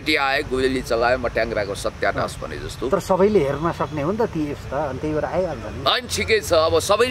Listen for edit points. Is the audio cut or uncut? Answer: uncut